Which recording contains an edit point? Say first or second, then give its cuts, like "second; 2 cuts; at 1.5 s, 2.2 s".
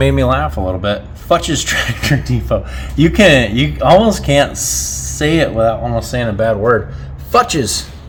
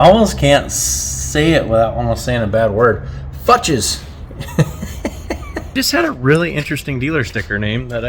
second; 1 cut; at 5.8 s